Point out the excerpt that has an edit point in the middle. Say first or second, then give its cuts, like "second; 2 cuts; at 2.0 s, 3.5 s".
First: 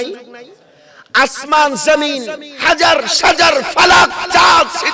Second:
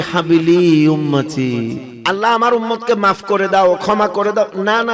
second; 1 cut; at 1.9 s